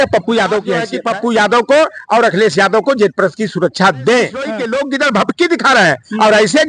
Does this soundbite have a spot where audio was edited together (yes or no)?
yes